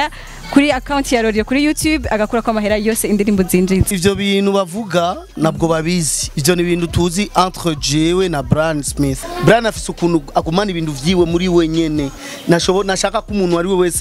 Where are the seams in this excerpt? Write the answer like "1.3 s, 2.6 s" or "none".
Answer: 3.9 s, 9.2 s